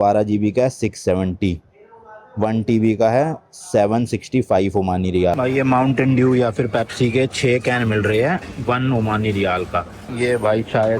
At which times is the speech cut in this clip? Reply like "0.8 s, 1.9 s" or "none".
5.4 s, 10.1 s